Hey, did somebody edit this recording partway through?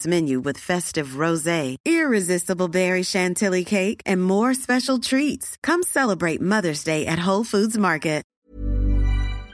yes; 1 cut; at 8.3 s

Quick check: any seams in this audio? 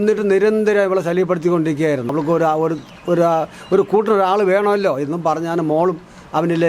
yes; 1 cut; at 2.1 s

